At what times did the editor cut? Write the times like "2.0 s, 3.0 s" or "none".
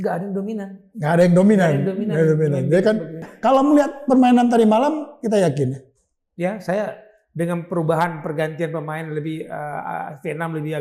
3.3 s